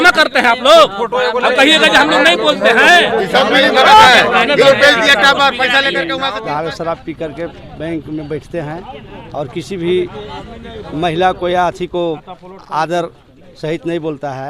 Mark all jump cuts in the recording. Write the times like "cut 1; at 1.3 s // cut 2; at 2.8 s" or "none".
cut 1; at 6.2 s